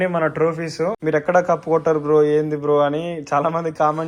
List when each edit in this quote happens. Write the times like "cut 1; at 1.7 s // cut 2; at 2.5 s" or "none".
cut 1; at 1.0 s